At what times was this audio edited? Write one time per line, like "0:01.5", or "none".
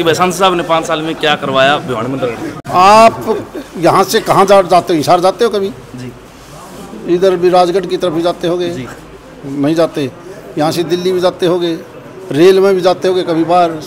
none

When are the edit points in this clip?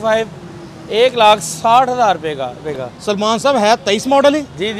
0:02.6

